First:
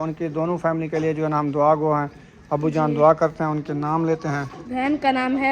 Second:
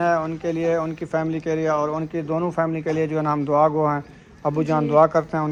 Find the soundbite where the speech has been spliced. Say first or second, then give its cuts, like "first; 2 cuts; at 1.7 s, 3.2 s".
first; 1 cut; at 4.6 s